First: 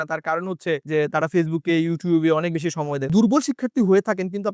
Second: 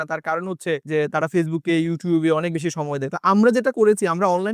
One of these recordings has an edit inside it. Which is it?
first; 1 cut; at 3.1 s

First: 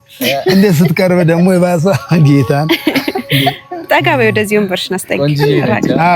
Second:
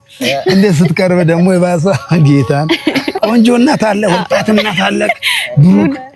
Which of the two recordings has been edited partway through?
second; 1 cut; at 3.1 s

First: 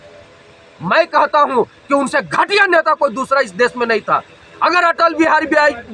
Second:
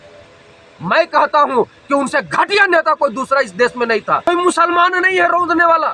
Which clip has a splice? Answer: second; 1 cut; at 4.2 s

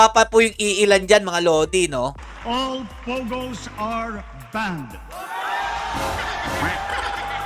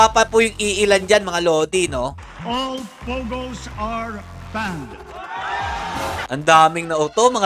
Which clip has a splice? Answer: second; 1 cut; at 6.3 s

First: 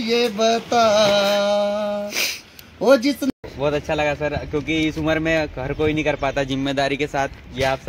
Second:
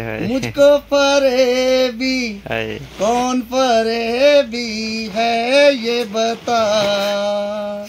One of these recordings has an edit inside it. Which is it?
first; 1 cut; at 3.3 s

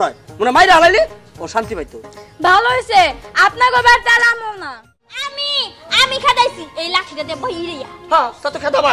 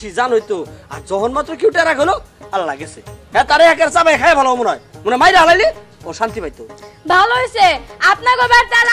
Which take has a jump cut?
first; 1 cut; at 5.4 s

